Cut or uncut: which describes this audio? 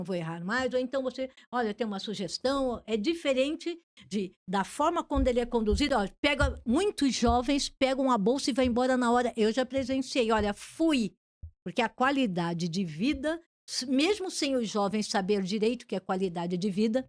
uncut